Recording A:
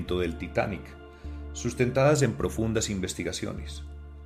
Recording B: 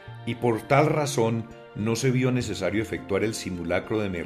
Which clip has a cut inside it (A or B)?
B